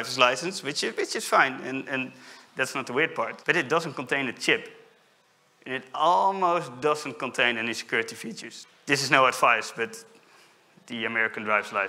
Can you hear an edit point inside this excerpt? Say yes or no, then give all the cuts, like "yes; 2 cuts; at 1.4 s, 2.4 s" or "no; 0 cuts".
yes; 2 cuts; at 3.4 s, 8.5 s